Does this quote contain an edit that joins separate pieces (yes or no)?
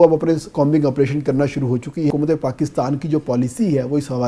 yes